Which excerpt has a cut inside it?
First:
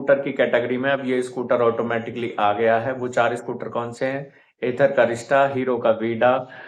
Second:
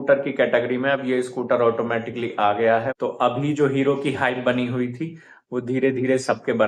second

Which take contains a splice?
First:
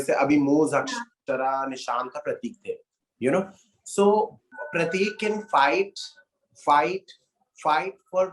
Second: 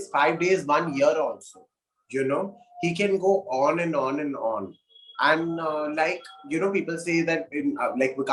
first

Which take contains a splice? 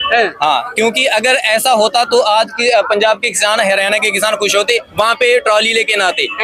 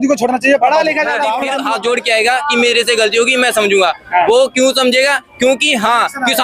second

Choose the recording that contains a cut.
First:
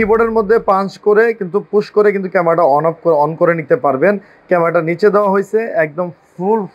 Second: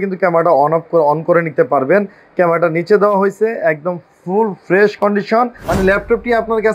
second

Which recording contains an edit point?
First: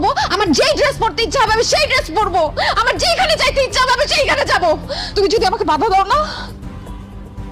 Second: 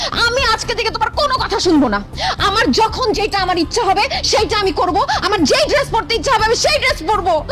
first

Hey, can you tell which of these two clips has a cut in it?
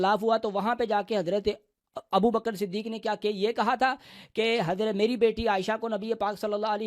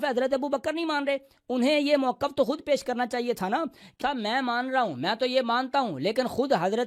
second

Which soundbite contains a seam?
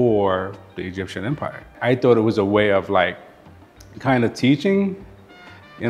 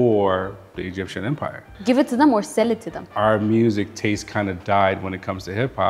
second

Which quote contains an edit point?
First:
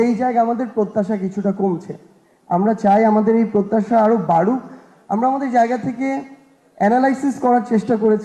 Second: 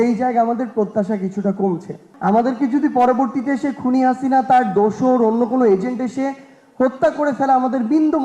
second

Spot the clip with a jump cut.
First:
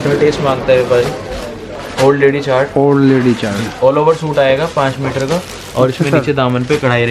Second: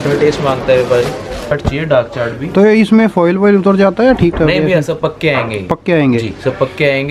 second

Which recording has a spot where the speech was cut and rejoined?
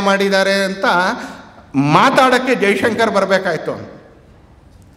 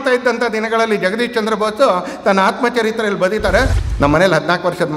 second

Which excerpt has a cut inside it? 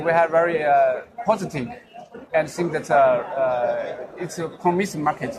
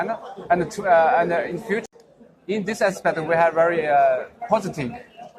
second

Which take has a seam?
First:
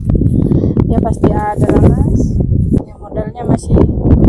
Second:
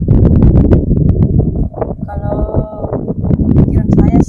first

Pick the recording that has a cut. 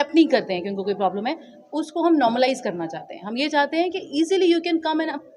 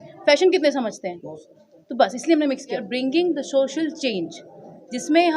second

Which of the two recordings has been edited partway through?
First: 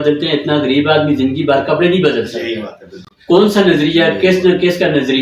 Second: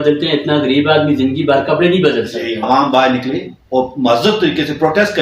second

